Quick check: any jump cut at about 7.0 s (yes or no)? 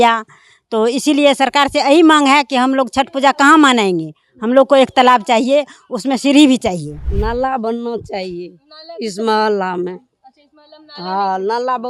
yes